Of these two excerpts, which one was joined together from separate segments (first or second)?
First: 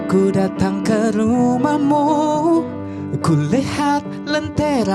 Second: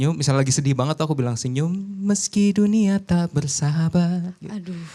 first